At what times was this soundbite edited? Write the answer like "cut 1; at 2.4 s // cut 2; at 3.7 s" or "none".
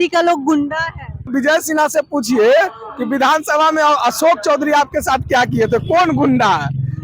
cut 1; at 1.3 s